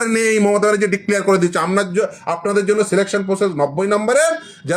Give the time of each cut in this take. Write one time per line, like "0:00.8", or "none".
none